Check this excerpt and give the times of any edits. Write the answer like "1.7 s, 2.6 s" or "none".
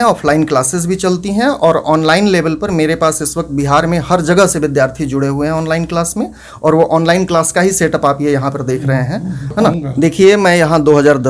9.8 s